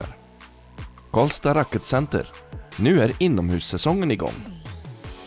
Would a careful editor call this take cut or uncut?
cut